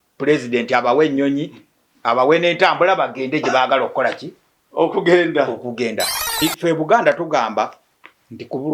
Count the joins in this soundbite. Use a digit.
1